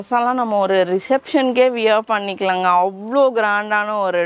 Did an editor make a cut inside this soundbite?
no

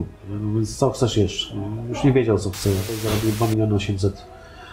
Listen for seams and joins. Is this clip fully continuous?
no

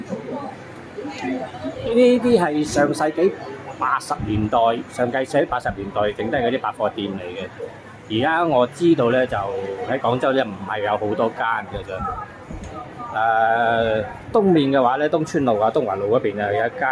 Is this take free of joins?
yes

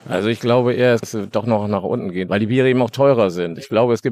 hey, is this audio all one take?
no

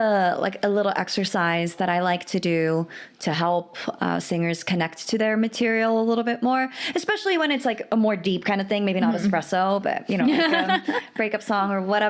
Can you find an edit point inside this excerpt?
no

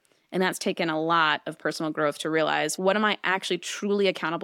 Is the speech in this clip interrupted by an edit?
yes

